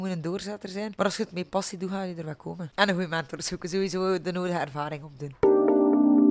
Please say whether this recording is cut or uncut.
cut